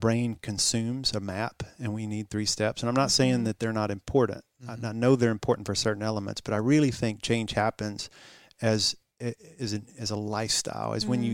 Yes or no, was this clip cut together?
no